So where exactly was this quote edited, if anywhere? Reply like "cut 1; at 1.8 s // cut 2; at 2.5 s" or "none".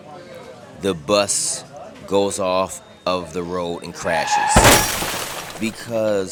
none